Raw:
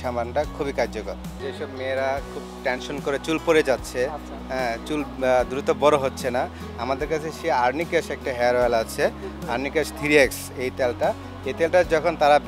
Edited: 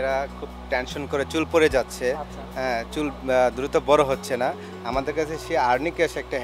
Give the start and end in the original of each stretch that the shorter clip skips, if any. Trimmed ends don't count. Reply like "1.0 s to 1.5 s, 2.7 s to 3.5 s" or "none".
none